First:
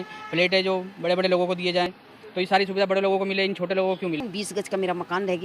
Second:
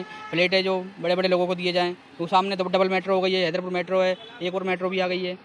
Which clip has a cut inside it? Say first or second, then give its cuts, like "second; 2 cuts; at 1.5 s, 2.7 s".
first; 2 cuts; at 2.0 s, 4.2 s